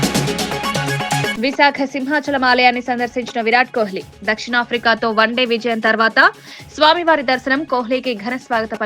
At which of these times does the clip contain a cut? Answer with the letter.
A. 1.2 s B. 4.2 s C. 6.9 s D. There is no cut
A